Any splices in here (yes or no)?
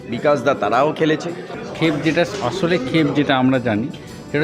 yes